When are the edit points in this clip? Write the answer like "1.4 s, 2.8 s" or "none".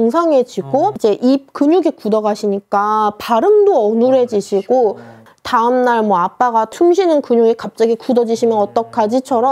1.0 s, 5.2 s, 6.7 s